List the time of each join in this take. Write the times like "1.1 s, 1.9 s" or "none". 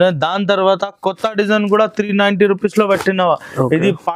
none